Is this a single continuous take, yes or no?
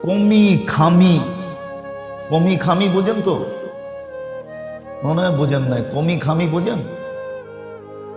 no